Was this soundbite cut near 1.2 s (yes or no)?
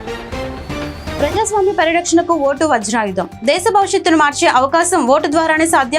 yes